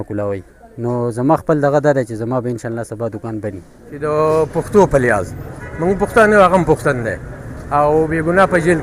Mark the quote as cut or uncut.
cut